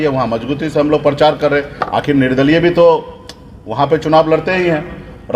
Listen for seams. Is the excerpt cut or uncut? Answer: uncut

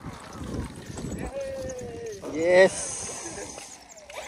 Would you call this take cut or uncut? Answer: uncut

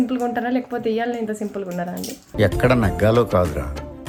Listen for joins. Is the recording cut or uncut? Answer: uncut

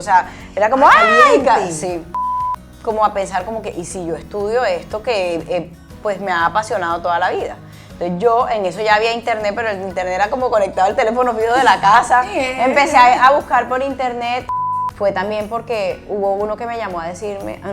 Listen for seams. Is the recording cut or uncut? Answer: cut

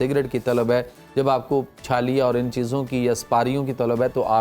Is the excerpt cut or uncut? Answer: uncut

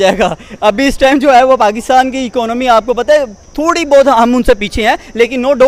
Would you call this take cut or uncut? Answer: uncut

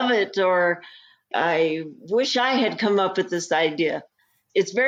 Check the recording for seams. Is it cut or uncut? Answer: uncut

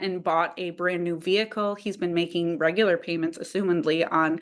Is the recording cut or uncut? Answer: uncut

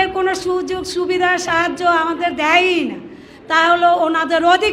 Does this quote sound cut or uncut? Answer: uncut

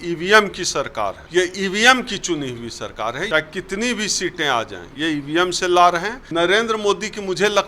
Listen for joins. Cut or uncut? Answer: cut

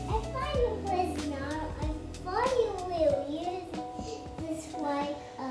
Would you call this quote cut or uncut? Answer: uncut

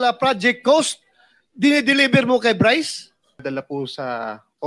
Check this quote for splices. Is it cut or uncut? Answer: cut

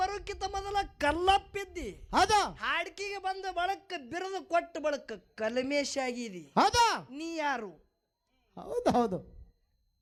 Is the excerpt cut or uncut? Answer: uncut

